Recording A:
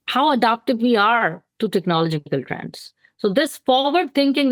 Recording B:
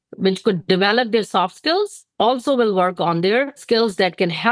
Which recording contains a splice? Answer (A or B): B